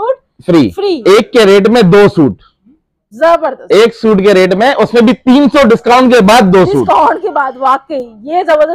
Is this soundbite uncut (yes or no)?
yes